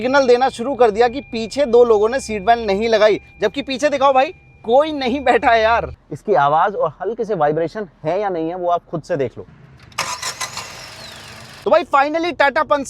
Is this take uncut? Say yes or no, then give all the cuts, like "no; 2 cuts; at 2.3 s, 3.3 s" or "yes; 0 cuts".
no; 3 cuts; at 6.0 s, 9.5 s, 11.5 s